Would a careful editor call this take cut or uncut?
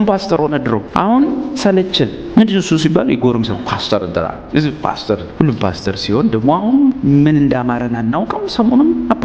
cut